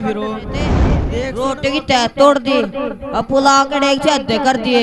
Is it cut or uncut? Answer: cut